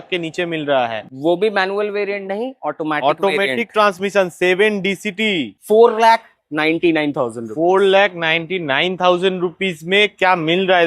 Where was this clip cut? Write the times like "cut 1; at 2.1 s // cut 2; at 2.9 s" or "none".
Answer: cut 1; at 5.5 s